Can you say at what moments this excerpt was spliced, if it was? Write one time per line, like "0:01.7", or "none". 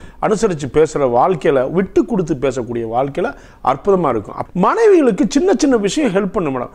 0:04.5